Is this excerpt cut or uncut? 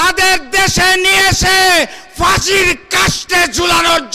uncut